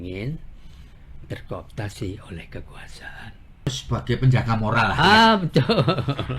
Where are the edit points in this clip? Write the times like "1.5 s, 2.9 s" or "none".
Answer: 3.8 s